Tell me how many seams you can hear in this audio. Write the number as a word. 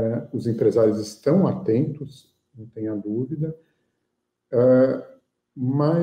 zero